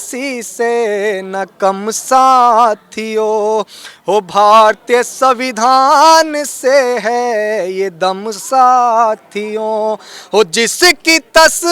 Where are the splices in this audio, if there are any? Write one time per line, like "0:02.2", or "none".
none